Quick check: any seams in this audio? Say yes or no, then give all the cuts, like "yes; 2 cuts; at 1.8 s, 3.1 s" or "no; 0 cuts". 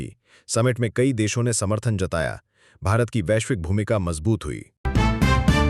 yes; 1 cut; at 4.8 s